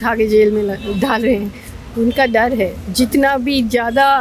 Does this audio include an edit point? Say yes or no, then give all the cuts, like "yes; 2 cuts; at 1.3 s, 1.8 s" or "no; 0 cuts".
no; 0 cuts